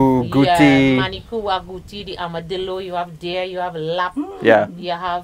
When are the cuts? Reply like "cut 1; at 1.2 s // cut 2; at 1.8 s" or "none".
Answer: none

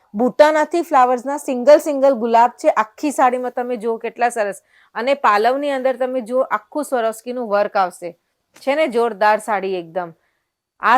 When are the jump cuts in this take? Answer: none

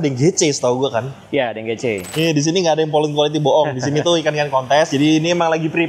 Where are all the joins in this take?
cut 1; at 2.0 s

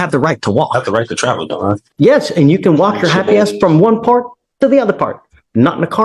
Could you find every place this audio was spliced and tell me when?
cut 1; at 1.8 s

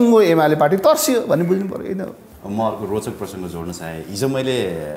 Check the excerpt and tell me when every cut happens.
none

